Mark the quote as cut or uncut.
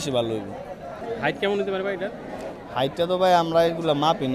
cut